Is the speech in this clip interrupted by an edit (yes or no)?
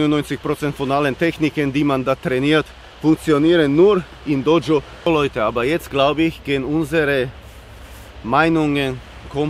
yes